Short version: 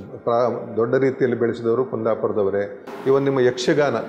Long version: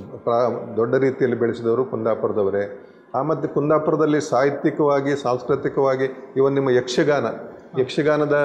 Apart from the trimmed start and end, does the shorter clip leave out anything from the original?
yes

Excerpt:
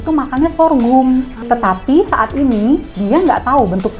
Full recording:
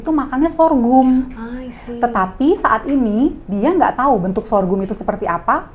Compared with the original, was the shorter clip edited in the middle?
yes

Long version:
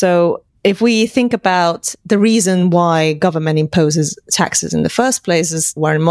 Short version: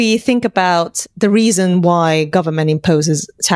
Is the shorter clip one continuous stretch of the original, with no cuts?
yes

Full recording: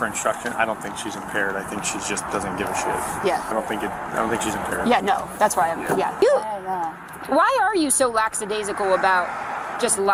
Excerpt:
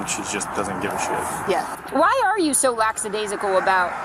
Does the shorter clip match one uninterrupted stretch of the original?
no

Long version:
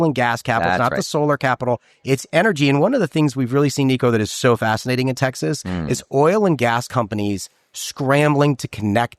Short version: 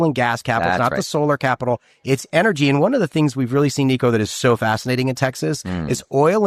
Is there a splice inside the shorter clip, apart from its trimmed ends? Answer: no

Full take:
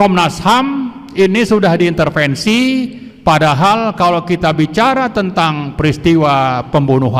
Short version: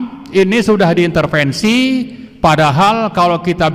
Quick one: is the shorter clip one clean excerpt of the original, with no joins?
yes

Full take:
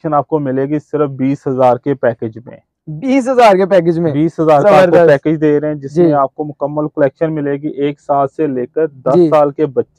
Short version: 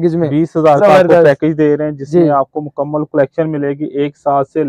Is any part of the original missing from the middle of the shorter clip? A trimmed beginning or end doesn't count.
no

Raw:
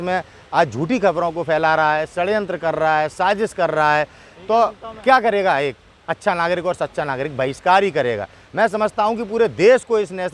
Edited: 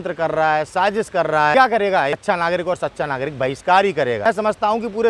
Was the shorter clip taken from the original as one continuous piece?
no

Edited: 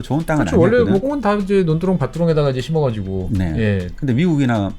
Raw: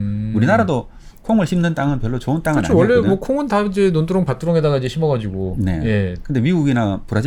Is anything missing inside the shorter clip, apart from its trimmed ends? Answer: yes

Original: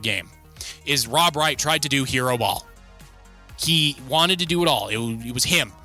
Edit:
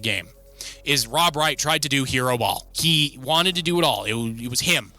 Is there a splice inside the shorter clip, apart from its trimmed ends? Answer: yes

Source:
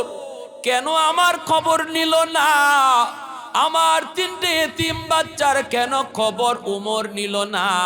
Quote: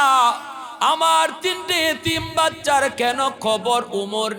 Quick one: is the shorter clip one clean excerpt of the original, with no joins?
yes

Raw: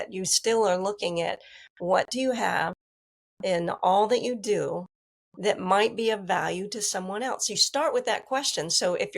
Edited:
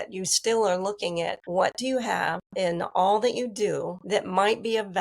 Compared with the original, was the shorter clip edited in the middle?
yes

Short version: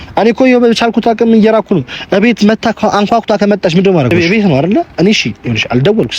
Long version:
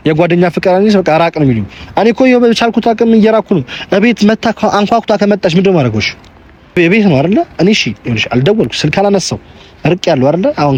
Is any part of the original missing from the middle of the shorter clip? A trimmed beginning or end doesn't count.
yes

